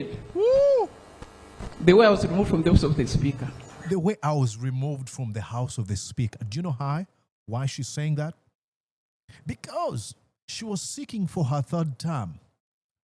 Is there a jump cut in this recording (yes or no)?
no